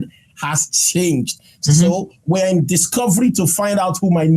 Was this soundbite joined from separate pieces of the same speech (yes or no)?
no